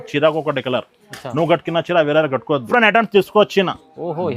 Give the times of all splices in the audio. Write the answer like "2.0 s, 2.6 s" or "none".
2.7 s

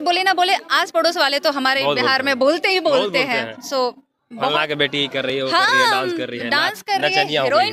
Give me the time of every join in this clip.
none

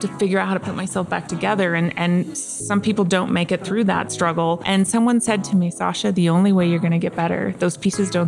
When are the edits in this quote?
4.6 s

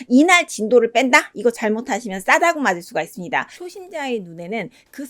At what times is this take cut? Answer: 3.6 s

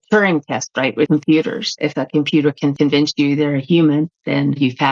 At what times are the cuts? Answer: 1.1 s, 1.7 s, 2.7 s

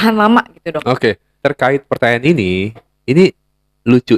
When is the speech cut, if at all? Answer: 1.3 s

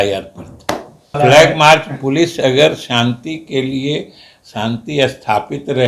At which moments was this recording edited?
1.2 s

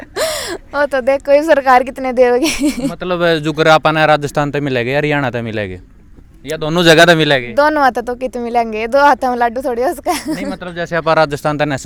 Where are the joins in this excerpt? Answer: none

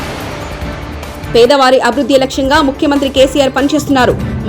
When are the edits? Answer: 1.2 s

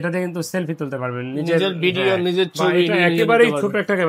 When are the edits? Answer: none

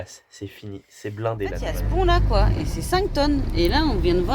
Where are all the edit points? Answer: 1.8 s

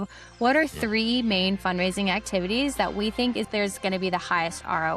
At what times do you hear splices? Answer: 3.5 s

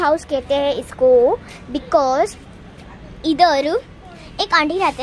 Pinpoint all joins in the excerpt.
none

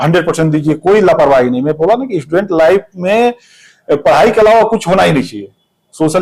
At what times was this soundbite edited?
none

